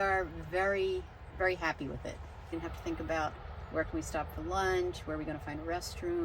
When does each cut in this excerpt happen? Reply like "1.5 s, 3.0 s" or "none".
2.5 s